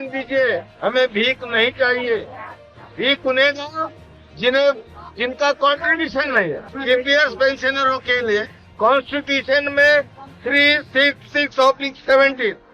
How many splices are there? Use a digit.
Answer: 1